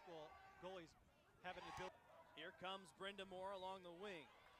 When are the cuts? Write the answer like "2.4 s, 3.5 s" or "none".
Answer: 1.9 s